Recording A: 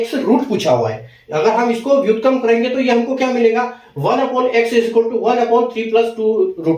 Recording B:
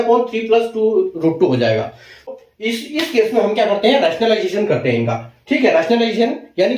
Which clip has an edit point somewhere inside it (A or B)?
B